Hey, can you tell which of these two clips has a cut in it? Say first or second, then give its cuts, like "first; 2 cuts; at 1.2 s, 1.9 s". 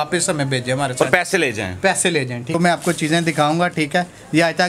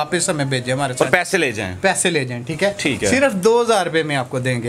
first; 1 cut; at 2.6 s